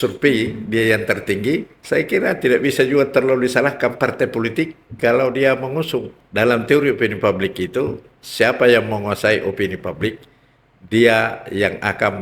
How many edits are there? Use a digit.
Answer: 2